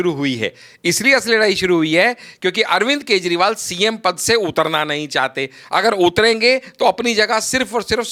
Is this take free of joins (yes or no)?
yes